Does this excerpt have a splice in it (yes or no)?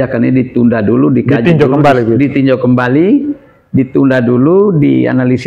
no